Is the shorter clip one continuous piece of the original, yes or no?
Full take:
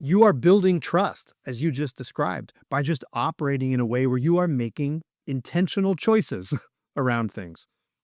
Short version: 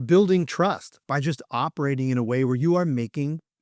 no